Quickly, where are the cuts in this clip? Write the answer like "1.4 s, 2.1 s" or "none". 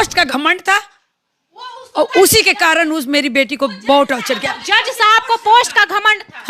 none